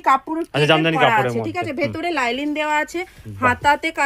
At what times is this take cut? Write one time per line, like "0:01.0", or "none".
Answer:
none